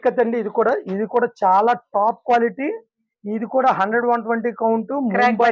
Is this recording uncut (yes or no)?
yes